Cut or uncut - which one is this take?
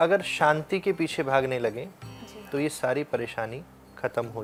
uncut